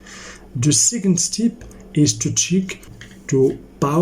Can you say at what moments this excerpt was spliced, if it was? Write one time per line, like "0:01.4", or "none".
0:03.0